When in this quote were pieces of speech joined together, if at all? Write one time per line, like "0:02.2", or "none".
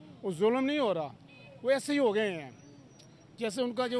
none